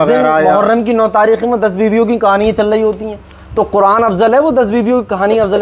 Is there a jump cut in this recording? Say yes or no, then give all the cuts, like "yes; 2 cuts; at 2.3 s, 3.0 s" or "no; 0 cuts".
no; 0 cuts